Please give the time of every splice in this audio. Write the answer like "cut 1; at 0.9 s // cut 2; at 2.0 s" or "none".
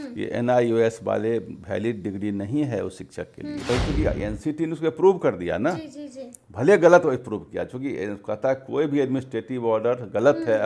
cut 1; at 3.7 s